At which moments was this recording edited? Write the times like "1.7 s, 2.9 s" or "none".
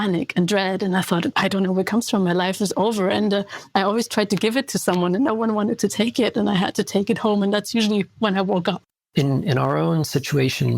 8.9 s

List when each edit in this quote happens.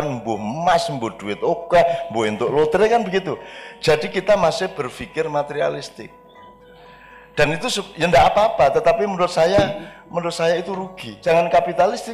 11.0 s

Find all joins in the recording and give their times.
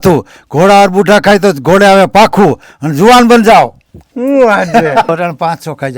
5.1 s

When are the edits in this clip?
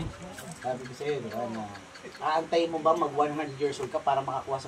none

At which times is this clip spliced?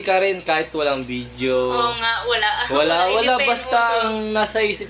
2.2 s

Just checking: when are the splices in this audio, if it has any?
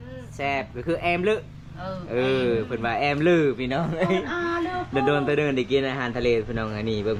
none

